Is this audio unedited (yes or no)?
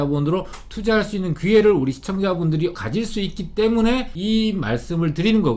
no